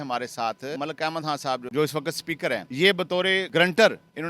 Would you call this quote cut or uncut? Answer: cut